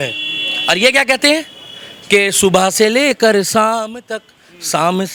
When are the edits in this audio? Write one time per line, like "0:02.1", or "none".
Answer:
none